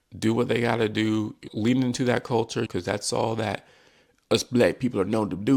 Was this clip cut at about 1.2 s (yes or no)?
no